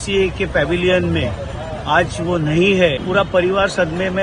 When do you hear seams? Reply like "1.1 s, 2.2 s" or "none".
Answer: 3.0 s